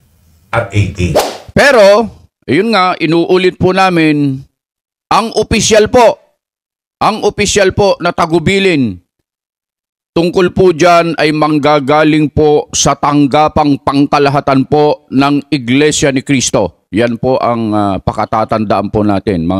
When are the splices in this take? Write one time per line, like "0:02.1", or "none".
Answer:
0:01.3